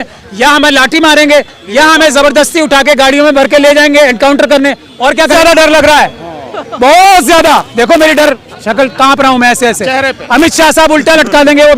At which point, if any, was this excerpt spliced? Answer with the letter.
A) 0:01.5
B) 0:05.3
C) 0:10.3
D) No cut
B